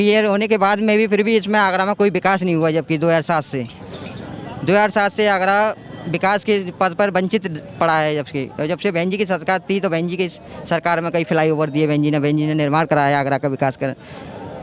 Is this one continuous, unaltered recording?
yes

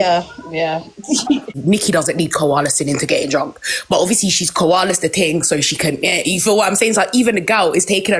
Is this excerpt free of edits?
no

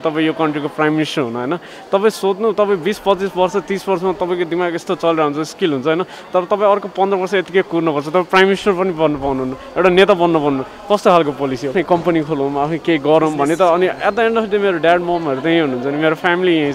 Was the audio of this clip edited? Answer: yes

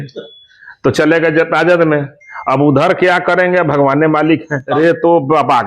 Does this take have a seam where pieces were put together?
yes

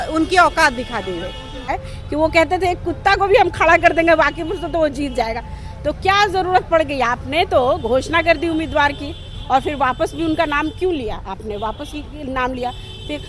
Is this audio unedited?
no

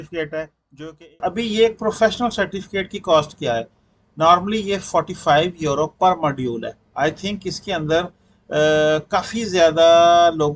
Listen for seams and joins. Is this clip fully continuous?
no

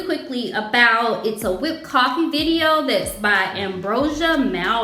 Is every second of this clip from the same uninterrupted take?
yes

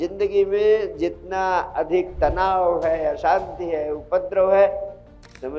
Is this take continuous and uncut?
yes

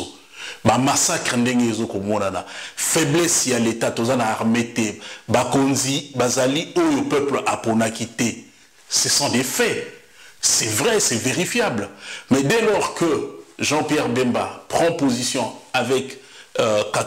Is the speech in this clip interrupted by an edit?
no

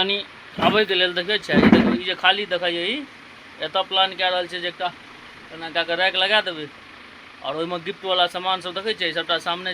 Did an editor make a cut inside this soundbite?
no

